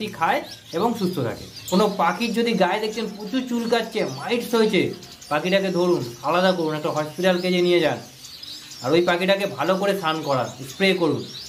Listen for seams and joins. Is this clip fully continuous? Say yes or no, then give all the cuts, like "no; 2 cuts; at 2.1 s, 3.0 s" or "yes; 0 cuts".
no; 1 cut; at 1.5 s